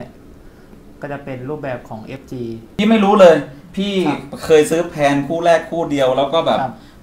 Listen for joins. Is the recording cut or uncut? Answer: cut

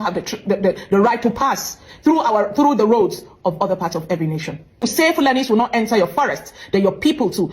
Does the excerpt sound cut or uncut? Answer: cut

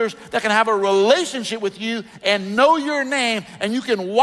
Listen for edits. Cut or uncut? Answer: uncut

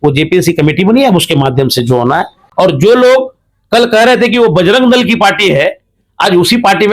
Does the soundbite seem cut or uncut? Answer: cut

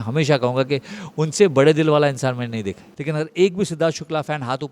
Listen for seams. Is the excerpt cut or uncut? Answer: cut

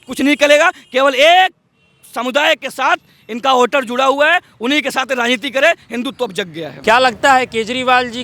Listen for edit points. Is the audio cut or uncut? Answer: cut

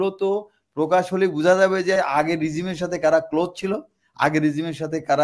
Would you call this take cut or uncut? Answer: uncut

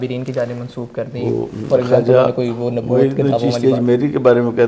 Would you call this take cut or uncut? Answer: uncut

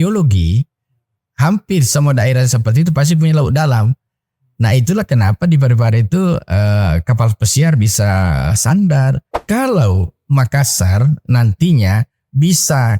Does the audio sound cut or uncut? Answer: cut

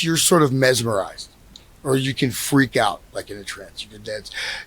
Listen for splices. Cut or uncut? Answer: uncut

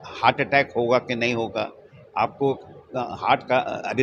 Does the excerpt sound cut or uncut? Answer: uncut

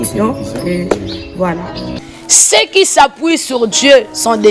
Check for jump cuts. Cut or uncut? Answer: cut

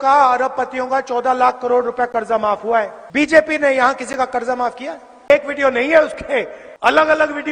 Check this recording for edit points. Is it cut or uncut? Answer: cut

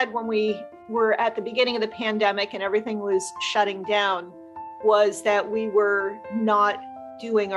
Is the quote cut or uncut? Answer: uncut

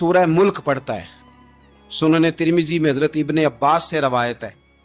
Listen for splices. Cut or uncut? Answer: uncut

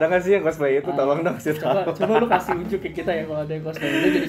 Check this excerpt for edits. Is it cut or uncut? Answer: uncut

